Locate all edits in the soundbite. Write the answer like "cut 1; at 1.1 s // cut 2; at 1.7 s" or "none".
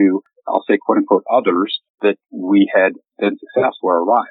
cut 1; at 3.1 s